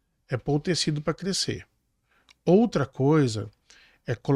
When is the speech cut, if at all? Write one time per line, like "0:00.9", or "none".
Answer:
none